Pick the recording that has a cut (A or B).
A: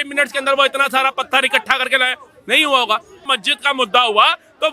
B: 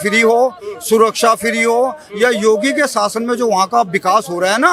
A